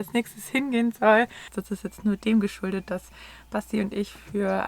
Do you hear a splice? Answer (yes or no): yes